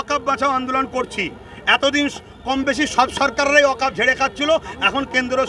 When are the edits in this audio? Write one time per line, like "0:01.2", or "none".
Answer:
none

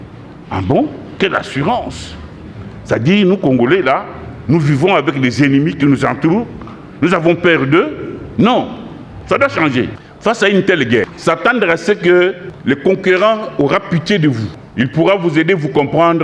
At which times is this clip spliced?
0:10.0
0:11.1
0:12.5
0:14.6

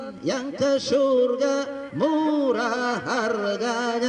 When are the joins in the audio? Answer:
none

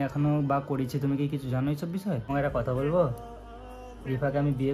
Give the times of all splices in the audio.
0:02.2

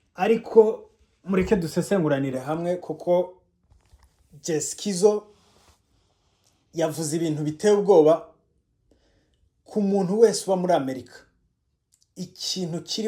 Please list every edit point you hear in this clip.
none

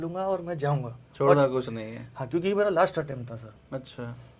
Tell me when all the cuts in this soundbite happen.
none

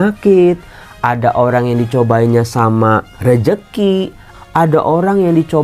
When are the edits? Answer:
0:03.1
0:04.3

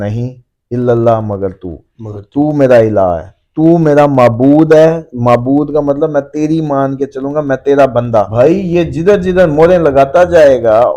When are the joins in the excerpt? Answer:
0:08.3

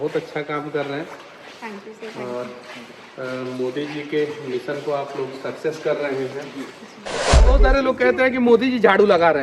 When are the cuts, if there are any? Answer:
0:07.4

